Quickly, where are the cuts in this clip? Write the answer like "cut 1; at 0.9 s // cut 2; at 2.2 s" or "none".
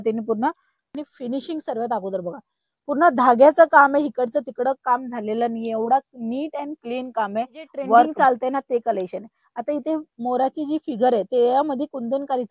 cut 1; at 0.9 s // cut 2; at 8.1 s